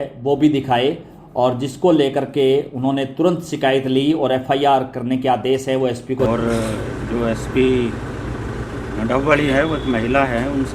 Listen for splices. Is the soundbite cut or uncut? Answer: cut